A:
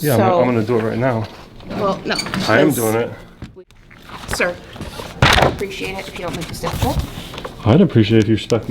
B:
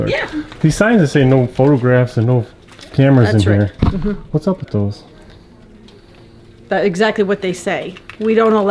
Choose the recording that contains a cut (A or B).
A